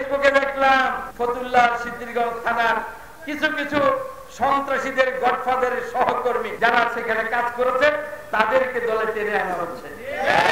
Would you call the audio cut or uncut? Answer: cut